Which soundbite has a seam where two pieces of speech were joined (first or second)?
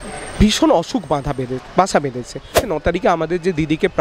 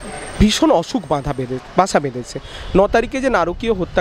first